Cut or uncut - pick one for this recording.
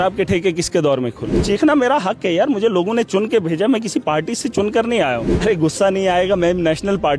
cut